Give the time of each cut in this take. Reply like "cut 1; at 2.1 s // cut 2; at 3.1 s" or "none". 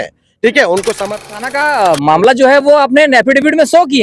cut 1; at 1.2 s